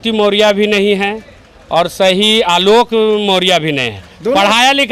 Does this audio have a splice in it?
no; 0 cuts

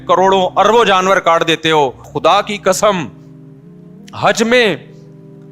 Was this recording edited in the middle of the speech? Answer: yes; 1 cut; at 2.1 s

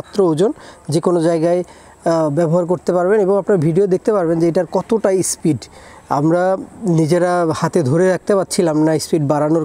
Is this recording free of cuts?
yes; 0 cuts

